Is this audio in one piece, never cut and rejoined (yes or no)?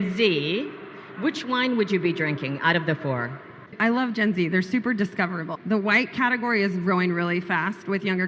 no